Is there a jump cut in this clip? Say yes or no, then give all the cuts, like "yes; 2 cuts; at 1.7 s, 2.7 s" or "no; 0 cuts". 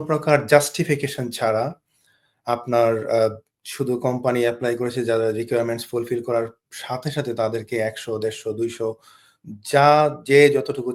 no; 0 cuts